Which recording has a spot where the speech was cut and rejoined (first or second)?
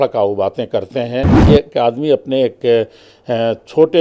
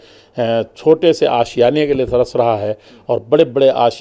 first